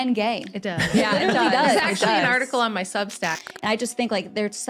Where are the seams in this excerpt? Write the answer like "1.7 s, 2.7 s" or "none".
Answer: 3.4 s